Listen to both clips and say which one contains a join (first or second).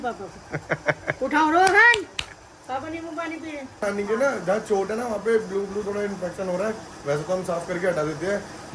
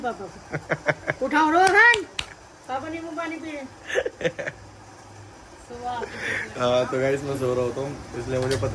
first